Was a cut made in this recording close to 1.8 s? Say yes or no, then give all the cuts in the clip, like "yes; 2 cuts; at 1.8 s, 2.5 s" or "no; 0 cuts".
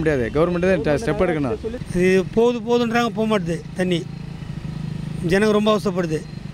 yes; 1 cut; at 1.8 s